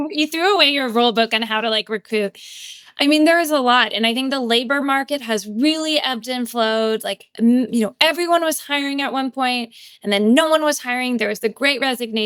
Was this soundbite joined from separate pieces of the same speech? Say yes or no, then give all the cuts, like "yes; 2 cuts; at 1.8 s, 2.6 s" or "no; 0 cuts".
no; 0 cuts